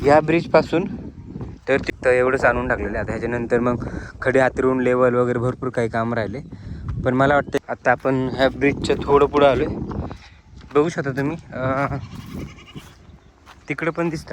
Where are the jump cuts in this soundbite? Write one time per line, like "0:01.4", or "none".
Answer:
0:01.8
0:07.6